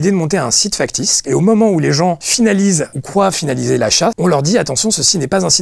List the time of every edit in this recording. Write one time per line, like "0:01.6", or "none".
0:01.2
0:04.2